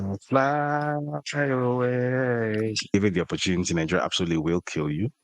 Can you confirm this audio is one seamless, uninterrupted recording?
no; 1 cut; at 2.9 s

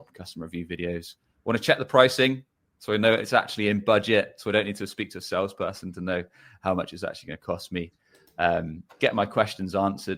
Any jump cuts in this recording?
no; 0 cuts

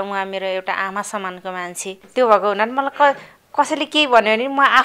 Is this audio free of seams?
no; 1 cut; at 2.0 s

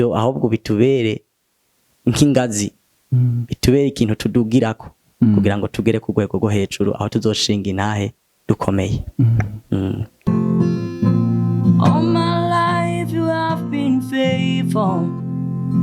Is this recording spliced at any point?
yes; 1 cut; at 10.3 s

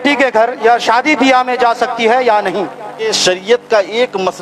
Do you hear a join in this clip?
yes; 1 cut; at 3.1 s

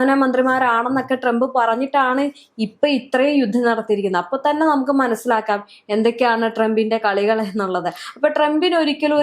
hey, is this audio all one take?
yes; 0 cuts

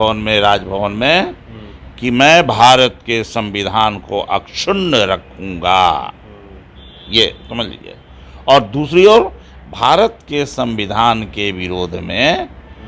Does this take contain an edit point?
no; 0 cuts

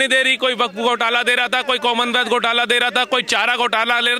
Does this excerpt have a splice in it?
no; 0 cuts

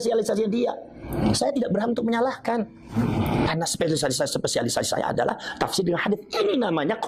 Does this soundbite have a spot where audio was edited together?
no; 0 cuts

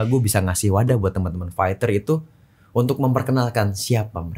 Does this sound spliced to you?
no; 0 cuts

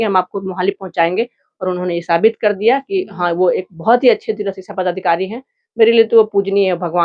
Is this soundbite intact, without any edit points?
yes; 0 cuts

